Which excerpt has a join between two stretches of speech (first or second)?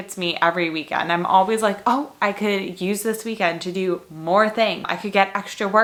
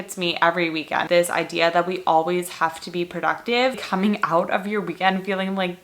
second